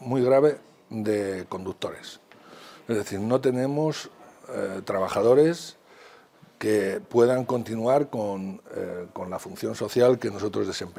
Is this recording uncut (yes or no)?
yes